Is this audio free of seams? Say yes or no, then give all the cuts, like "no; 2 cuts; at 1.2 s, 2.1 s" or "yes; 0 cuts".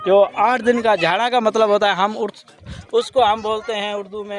yes; 0 cuts